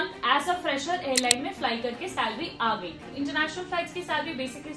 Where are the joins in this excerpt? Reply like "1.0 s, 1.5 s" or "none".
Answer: 3.1 s